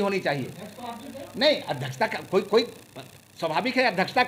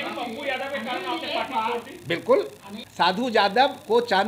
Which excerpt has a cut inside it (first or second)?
second